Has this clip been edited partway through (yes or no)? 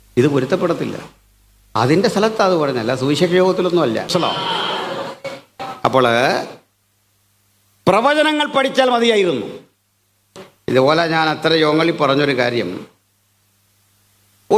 no